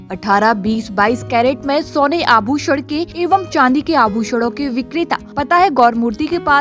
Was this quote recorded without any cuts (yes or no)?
no